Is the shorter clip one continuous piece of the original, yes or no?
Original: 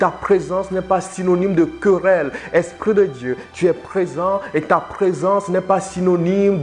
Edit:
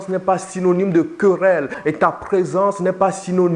no